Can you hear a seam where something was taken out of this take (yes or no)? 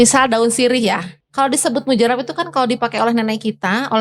yes